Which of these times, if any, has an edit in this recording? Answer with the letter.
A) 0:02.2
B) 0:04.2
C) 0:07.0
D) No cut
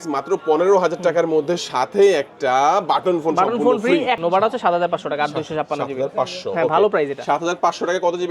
B